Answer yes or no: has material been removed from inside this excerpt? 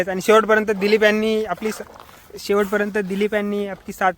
no